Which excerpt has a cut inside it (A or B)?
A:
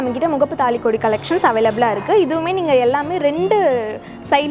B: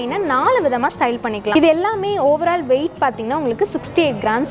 B